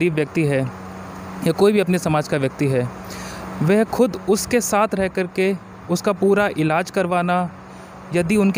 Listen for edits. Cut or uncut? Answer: uncut